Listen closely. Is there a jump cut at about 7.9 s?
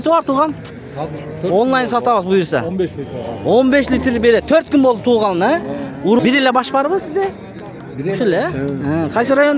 no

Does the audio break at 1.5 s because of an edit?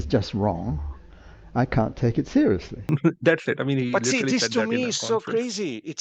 no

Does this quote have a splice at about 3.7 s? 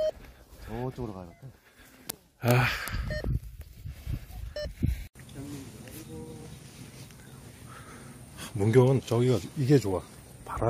no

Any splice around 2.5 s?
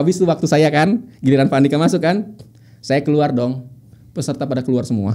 no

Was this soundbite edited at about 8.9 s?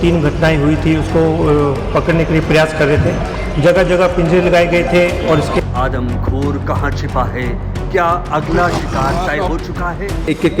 no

